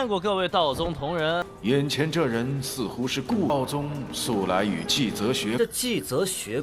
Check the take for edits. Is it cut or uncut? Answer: cut